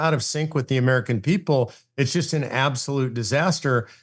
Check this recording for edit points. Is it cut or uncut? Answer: uncut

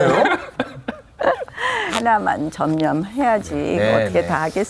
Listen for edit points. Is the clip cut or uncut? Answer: cut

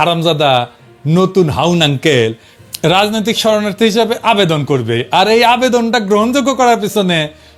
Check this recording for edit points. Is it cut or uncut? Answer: uncut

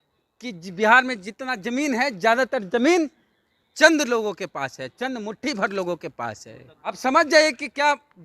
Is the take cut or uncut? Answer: cut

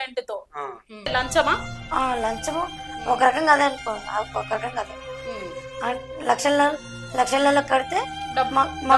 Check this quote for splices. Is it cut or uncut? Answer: cut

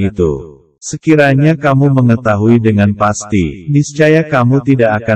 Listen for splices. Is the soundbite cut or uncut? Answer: uncut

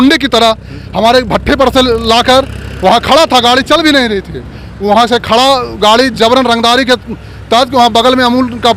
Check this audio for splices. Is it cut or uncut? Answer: uncut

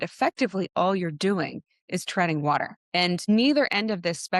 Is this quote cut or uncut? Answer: cut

